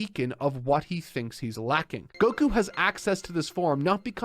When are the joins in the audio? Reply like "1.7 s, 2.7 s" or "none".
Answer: 2.0 s